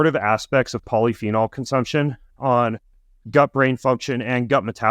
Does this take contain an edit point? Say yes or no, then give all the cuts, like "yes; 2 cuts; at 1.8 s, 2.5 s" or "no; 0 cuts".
no; 0 cuts